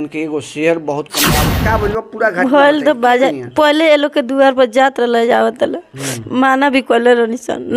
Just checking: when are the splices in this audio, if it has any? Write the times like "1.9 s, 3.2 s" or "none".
1.4 s